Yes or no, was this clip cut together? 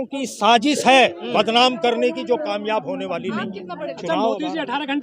yes